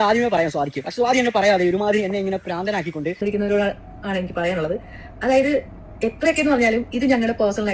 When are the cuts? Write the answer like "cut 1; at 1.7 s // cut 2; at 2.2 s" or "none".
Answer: cut 1; at 3.2 s